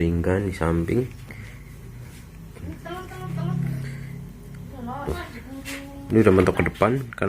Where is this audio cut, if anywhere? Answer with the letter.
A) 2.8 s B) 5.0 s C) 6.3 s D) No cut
B